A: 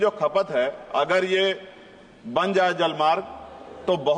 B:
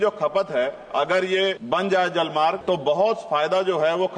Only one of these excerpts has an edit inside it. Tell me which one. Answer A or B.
B